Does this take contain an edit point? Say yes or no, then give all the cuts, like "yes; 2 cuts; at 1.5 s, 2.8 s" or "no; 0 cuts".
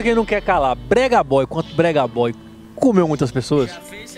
no; 0 cuts